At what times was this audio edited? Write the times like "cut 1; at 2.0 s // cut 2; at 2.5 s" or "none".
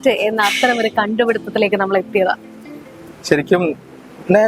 none